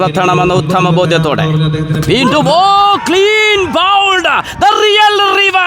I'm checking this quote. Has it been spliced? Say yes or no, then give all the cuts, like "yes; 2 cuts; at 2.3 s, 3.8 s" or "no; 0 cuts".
no; 0 cuts